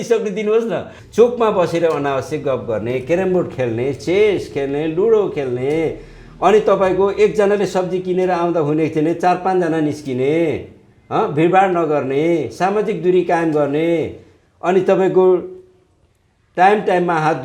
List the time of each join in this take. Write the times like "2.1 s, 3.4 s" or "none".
1.0 s